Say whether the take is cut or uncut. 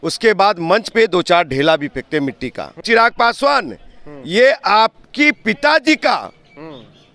cut